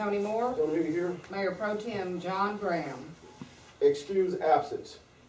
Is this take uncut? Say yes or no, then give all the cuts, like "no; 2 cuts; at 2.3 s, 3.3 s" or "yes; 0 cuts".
yes; 0 cuts